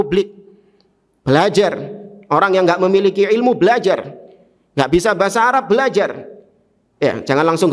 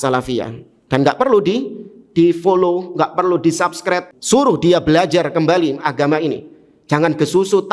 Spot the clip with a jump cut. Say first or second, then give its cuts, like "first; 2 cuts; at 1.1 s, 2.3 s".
second; 1 cut; at 4.1 s